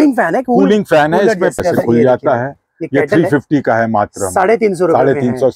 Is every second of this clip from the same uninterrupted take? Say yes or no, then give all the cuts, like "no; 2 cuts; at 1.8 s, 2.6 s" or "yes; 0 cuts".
no; 1 cut; at 1.6 s